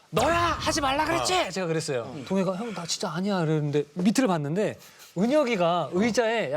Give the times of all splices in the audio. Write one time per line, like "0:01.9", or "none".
0:02.2